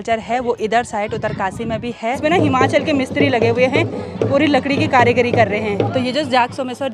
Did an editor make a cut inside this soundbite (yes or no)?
yes